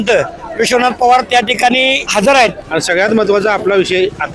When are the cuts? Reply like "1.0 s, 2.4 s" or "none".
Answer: 2.0 s, 2.6 s